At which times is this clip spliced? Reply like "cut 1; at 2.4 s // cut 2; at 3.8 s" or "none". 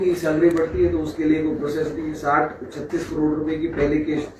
none